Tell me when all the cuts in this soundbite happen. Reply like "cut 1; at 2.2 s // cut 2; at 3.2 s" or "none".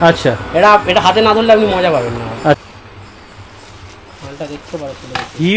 cut 1; at 2.6 s